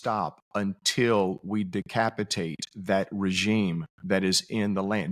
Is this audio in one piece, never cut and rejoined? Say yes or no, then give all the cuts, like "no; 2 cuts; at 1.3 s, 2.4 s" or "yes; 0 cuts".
yes; 0 cuts